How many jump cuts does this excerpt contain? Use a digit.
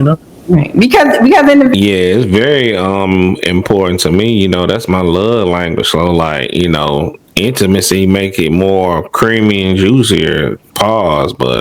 1